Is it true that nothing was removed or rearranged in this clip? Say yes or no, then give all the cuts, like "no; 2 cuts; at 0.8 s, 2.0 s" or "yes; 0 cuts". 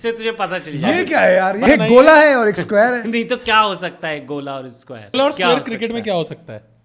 no; 2 cuts; at 1.7 s, 5.1 s